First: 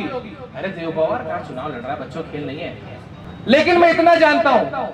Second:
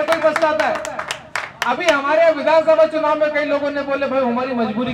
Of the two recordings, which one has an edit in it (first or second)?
first